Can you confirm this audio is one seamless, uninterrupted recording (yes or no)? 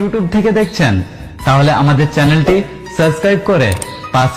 yes